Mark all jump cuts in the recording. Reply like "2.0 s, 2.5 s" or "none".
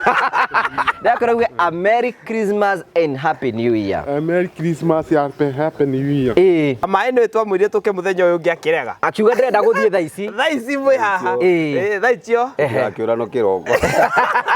6.9 s